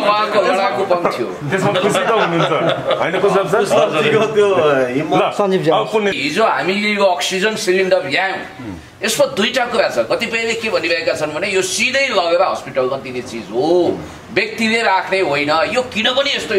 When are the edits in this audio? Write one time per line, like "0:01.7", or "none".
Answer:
0:06.1

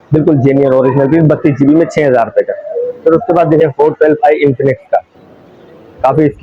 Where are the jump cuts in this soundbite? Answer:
0:03.6

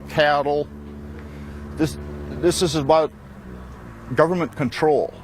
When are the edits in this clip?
0:01.7

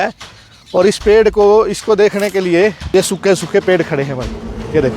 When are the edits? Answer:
0:02.8

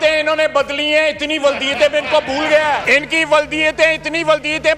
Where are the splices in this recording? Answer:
0:02.8

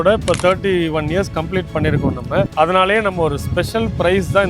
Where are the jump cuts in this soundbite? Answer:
0:02.5

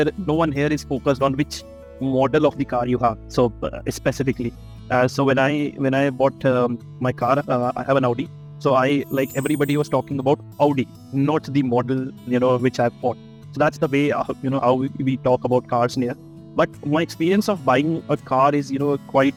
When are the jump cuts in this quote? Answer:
none

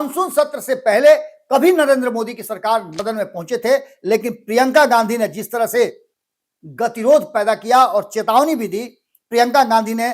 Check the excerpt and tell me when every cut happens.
0:02.9

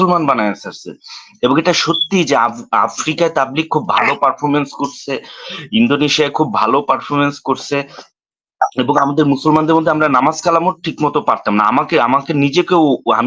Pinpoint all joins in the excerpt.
none

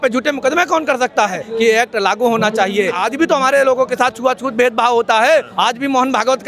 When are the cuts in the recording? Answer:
0:01.4
0:03.0
0:05.5

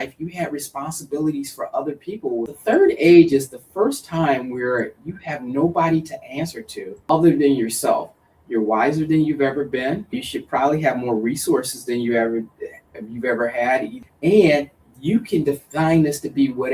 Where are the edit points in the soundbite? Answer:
0:02.5
0:07.0
0:10.2
0:14.0

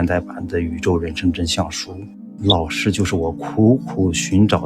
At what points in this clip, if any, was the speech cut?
0:02.3

